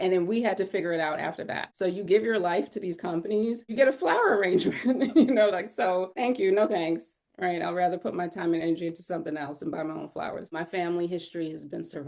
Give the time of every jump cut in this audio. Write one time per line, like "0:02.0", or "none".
0:03.7
0:10.5